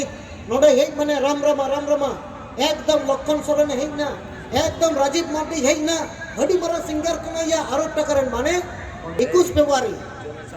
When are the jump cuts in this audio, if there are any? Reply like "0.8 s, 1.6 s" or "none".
9.2 s

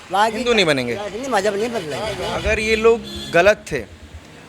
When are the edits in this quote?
2.2 s

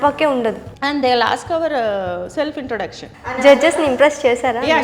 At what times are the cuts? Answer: 3.3 s

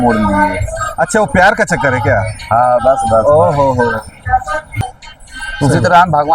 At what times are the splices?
4.8 s

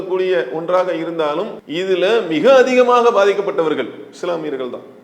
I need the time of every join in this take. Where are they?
1.6 s

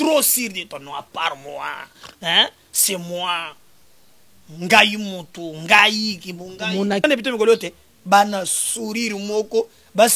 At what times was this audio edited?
7.0 s

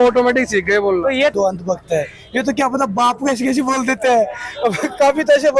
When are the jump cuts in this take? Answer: 1.3 s

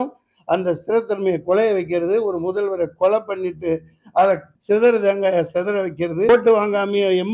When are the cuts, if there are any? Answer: 4.5 s, 6.3 s

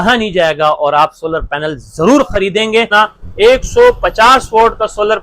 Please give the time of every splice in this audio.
2.9 s

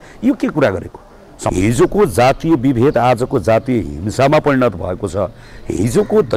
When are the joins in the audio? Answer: 1.5 s

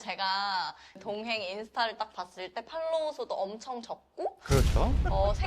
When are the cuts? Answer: 1.0 s

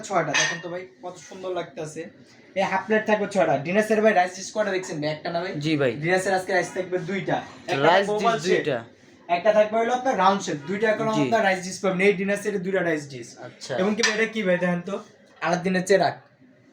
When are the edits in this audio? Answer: none

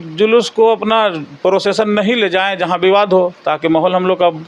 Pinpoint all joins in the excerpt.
none

